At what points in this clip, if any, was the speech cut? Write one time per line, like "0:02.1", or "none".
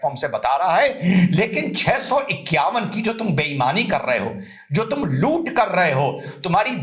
none